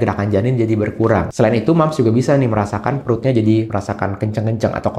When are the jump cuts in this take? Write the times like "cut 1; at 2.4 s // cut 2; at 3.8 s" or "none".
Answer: cut 1; at 1.3 s // cut 2; at 3.7 s